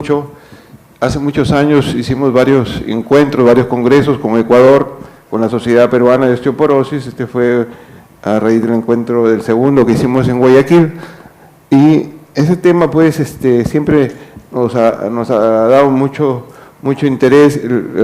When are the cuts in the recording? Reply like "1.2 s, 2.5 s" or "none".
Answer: 15.7 s